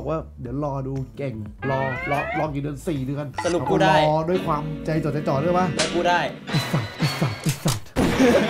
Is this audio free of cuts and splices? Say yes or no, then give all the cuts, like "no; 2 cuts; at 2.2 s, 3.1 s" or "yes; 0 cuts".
yes; 0 cuts